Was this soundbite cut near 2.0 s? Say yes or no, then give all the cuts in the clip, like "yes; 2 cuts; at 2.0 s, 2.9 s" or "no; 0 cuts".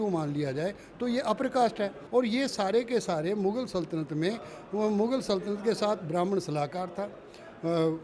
yes; 1 cut; at 2.0 s